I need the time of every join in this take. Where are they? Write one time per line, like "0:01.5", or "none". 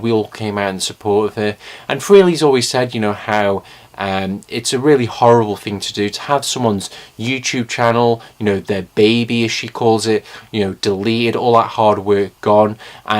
0:08.8